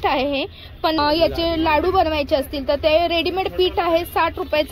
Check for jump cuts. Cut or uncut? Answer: cut